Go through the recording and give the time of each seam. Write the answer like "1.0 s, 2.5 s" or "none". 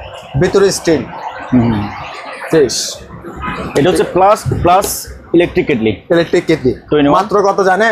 none